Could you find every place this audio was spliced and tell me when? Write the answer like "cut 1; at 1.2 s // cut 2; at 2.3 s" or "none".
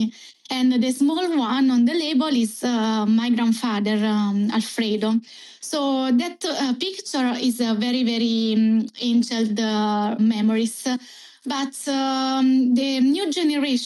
none